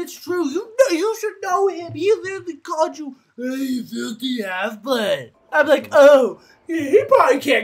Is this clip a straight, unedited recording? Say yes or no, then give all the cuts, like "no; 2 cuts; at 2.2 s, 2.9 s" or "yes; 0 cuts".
no; 1 cut; at 5.4 s